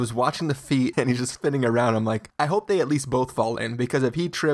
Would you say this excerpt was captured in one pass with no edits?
no; 2 cuts; at 0.9 s, 2.3 s

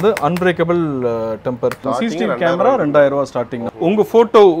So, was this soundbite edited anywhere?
yes; 2 cuts; at 1.8 s, 3.6 s

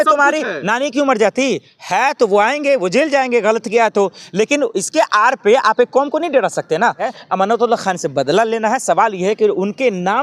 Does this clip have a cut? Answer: yes; 1 cut; at 7.1 s

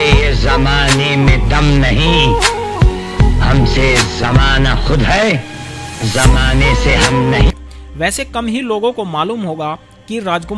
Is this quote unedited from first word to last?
yes; 0 cuts

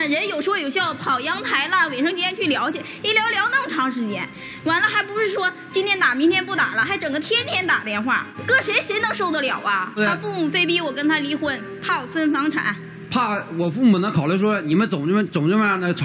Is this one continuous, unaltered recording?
no; 2 cuts; at 8.3 s, 10.0 s

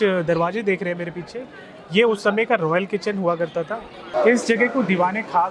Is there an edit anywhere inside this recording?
yes; 1 cut; at 4.0 s

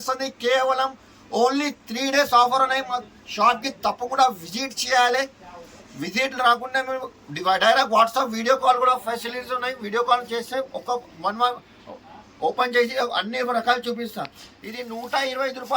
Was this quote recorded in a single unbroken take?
yes; 0 cuts

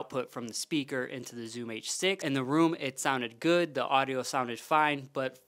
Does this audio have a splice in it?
yes; 1 cut; at 2.2 s

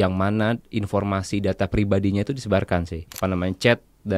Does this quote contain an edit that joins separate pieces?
yes; 1 cut; at 3.0 s

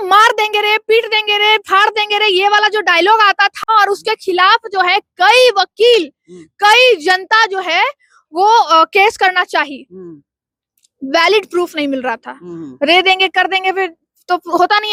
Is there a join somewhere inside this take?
no; 0 cuts

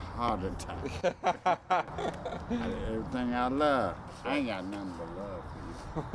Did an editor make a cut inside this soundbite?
yes; 1 cut; at 4.1 s

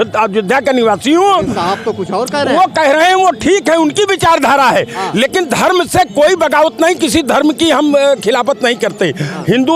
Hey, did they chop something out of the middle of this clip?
no; 0 cuts

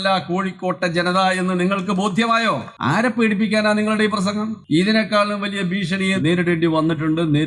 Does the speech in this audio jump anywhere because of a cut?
yes; 3 cuts; at 2.7 s, 4.6 s, 6.2 s

